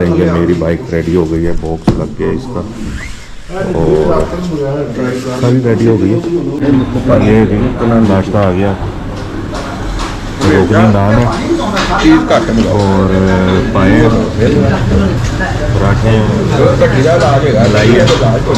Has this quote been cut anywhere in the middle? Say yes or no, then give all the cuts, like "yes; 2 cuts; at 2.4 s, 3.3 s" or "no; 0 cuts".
yes; 1 cut; at 6.5 s